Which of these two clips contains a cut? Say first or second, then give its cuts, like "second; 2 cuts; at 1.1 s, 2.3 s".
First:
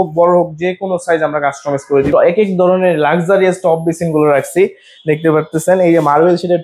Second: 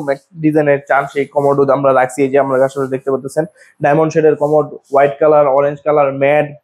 first; 1 cut; at 2.1 s